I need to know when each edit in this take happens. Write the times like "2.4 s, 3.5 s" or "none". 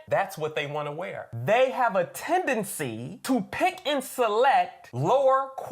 1.2 s

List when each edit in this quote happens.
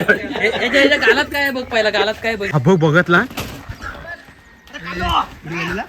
2.4 s

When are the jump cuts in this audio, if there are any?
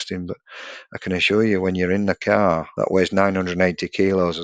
2.7 s

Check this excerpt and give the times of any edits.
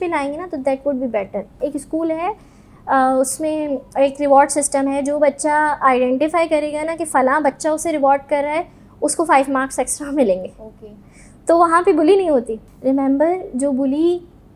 1.5 s, 12.6 s

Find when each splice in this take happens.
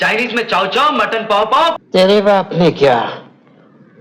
1.8 s

